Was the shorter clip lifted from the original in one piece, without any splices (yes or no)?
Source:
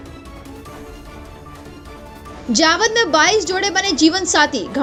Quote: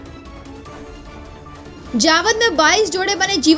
no